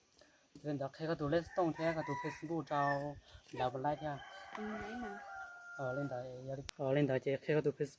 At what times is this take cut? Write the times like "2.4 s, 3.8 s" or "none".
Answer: 6.6 s